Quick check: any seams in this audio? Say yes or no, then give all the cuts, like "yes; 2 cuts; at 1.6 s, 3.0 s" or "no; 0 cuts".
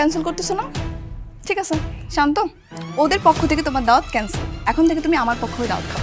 no; 0 cuts